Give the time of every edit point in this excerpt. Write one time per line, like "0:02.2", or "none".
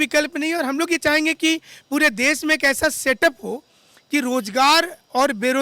none